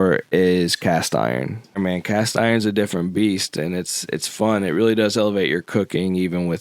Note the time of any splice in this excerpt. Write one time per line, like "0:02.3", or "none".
0:01.8